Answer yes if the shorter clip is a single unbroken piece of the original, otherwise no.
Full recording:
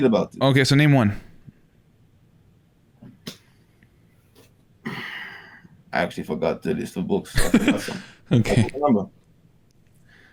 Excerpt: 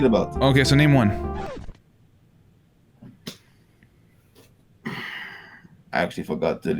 yes